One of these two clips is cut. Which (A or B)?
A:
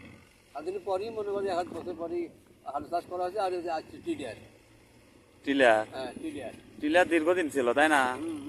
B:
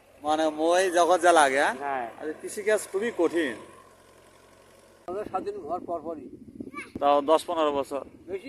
B